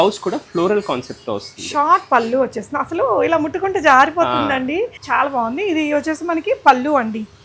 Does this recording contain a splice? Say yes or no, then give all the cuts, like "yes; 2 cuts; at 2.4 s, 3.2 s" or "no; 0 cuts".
yes; 1 cut; at 5.0 s